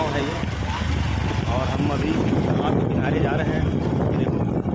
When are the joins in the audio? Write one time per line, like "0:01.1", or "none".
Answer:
0:03.8